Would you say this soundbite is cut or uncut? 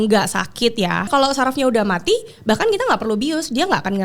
cut